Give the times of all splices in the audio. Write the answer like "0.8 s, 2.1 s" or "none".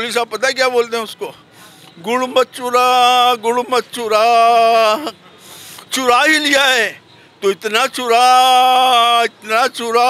none